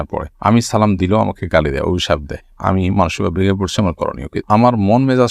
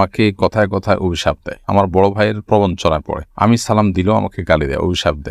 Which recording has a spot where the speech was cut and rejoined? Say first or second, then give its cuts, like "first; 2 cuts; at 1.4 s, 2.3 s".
first; 1 cut; at 4.3 s